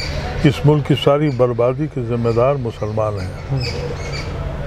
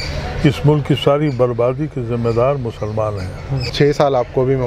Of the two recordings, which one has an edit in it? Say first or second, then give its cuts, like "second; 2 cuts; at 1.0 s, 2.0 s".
second; 1 cut; at 3.6 s